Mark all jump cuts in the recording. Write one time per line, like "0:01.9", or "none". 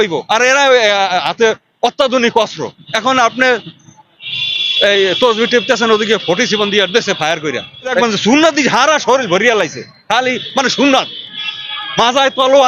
0:08.0